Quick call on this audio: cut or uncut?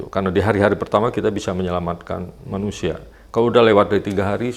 uncut